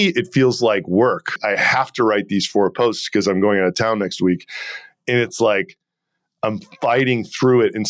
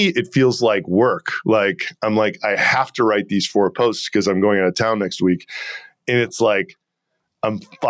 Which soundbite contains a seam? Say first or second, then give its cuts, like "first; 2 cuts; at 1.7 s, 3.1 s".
first; 1 cut; at 1.4 s